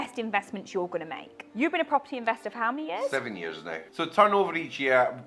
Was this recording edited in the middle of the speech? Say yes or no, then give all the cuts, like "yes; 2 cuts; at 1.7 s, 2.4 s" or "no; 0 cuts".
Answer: yes; 2 cuts; at 1.5 s, 3.9 s